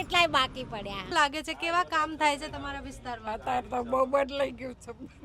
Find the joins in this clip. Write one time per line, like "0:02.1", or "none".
0:01.1